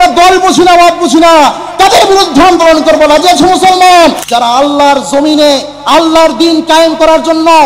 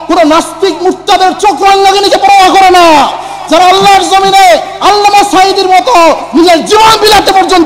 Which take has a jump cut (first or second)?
first